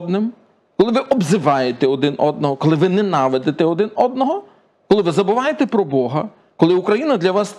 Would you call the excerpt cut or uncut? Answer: uncut